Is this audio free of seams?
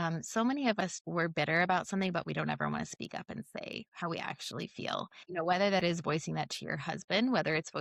no; 2 cuts; at 0.9 s, 5.2 s

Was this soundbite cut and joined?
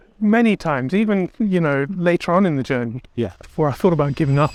no; 0 cuts

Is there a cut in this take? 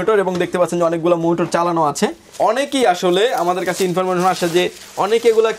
yes; 1 cut; at 2.3 s

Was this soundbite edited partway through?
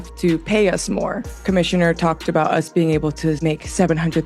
yes; 1 cut; at 1.4 s

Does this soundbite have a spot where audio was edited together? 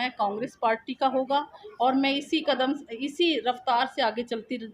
yes; 1 cut; at 1.6 s

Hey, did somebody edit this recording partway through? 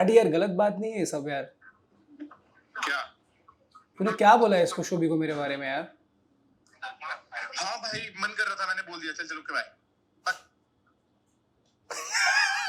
no; 0 cuts

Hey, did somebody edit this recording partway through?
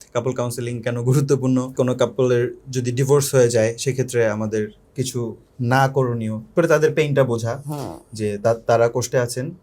yes; 2 cuts; at 1.7 s, 6.5 s

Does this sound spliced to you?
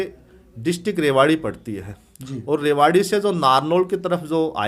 no; 0 cuts

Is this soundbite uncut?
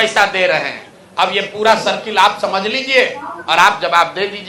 yes; 0 cuts

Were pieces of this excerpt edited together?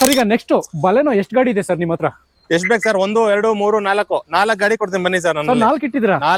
no; 0 cuts

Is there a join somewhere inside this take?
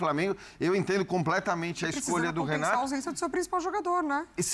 no; 0 cuts

